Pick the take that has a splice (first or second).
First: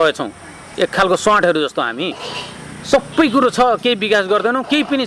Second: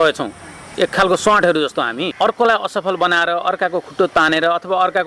second